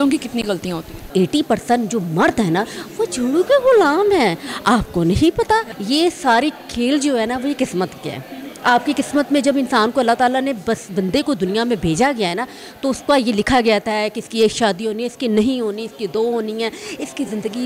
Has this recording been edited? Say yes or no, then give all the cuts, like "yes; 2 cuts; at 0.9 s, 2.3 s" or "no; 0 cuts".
yes; 2 cuts; at 1.1 s, 5.7 s